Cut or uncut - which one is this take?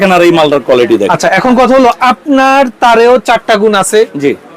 cut